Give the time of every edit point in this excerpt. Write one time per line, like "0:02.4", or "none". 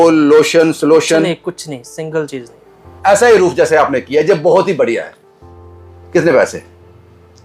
0:02.8